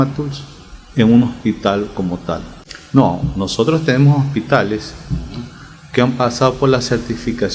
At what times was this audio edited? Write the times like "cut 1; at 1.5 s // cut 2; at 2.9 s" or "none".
cut 1; at 2.6 s